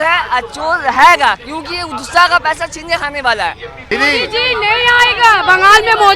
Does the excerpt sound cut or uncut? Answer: cut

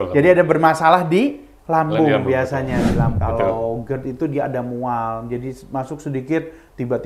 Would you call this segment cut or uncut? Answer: cut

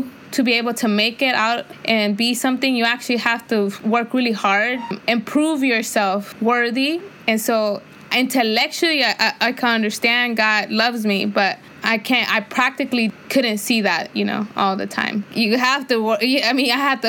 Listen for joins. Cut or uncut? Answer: cut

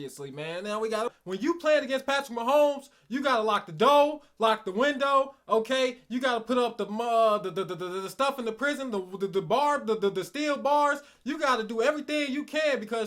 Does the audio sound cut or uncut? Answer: cut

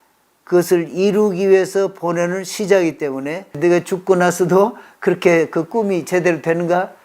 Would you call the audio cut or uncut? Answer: cut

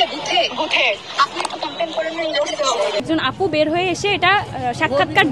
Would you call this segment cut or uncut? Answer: cut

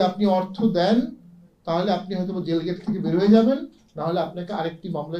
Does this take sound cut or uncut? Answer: uncut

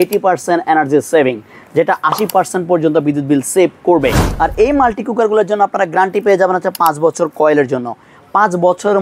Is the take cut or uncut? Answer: cut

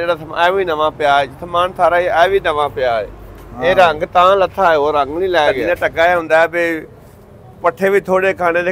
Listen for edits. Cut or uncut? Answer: cut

